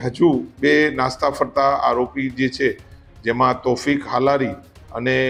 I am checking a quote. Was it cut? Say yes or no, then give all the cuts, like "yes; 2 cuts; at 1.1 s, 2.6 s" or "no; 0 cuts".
no; 0 cuts